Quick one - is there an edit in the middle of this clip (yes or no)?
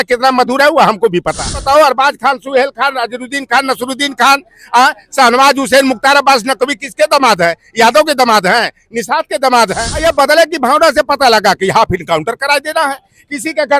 yes